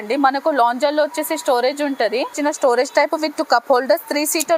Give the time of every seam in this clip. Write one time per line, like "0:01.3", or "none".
none